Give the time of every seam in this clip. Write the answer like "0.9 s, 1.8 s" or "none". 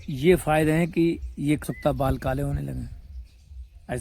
1.6 s